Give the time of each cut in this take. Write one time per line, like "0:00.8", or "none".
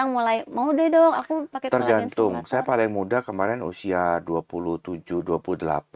none